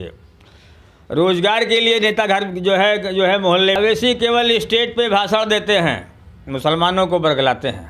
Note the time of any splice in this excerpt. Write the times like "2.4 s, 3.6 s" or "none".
3.8 s